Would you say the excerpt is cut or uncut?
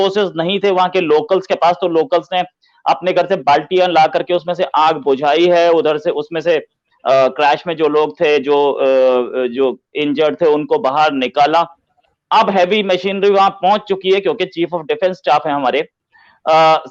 uncut